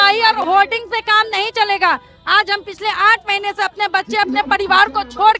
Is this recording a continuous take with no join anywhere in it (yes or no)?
yes